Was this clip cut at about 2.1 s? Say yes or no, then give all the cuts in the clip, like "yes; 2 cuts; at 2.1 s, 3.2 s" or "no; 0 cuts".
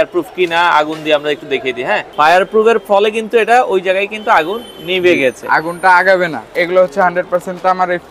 yes; 2 cuts; at 2.1 s, 6.5 s